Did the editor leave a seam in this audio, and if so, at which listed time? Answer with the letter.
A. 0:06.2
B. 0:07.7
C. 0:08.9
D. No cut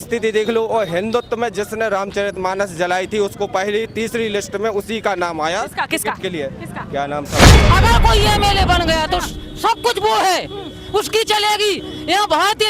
B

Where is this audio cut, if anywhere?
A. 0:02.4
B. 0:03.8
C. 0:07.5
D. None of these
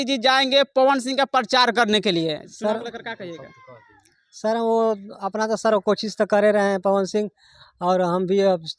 A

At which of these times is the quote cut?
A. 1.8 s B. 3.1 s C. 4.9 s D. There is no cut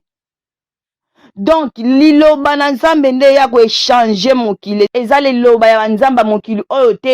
C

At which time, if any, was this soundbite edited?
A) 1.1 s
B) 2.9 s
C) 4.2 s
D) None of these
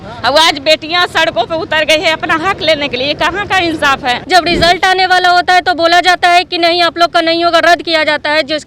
C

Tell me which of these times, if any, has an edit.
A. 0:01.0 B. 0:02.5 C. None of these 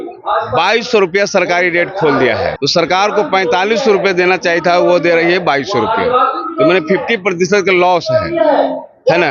B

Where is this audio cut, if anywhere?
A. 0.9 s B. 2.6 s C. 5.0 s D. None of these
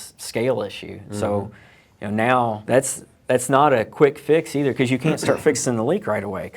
B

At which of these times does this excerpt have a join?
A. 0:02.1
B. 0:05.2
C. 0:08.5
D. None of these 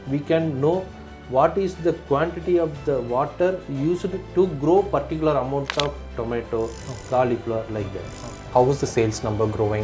C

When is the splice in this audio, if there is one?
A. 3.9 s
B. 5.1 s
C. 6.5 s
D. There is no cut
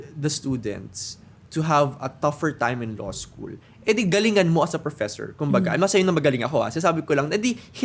D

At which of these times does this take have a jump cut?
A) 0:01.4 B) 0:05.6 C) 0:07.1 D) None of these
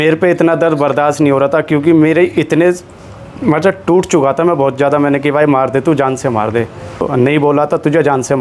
C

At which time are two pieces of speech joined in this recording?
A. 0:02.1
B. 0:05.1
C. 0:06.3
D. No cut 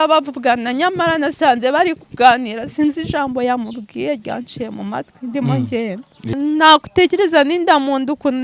C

